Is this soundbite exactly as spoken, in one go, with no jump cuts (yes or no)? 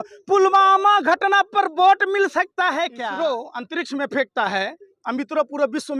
no